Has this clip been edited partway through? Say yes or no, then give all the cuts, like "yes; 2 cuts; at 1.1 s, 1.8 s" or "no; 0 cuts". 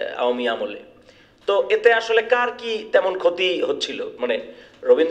no; 0 cuts